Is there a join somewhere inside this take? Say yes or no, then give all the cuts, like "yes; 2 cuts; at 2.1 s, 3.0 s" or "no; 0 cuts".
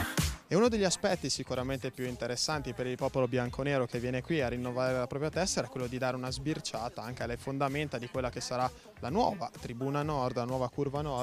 yes; 1 cut; at 9.6 s